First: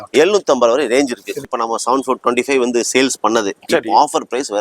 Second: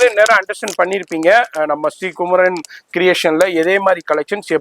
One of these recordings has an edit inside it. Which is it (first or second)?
first